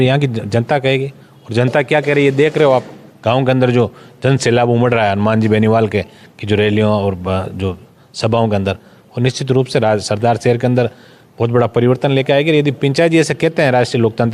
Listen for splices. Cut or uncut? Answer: uncut